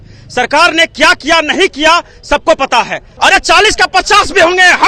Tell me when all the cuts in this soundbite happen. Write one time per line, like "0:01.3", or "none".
0:03.0